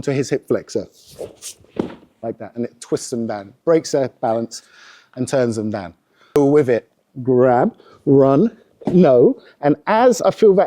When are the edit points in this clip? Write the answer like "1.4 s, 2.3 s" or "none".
6.3 s

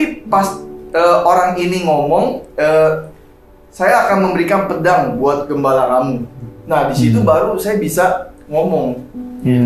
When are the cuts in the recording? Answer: none

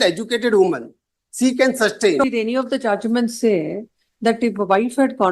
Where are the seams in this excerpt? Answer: 2.2 s

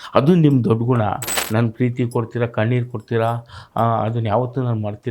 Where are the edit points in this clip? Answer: 1.3 s

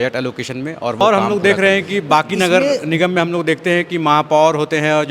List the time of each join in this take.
1.0 s

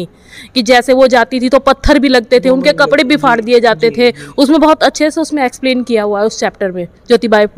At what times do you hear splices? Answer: none

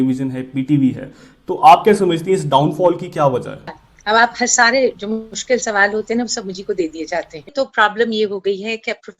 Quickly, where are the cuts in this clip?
3.9 s, 5.3 s, 7.5 s

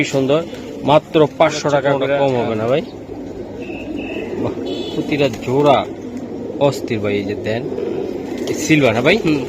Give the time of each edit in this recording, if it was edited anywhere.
2.1 s

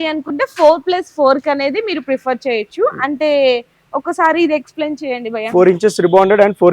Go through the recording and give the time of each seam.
none

